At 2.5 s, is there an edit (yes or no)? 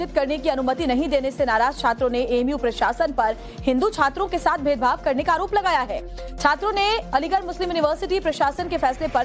yes